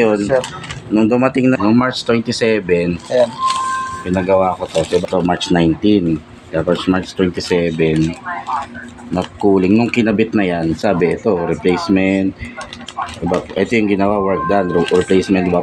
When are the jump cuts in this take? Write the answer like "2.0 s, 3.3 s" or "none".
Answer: 1.6 s, 5.0 s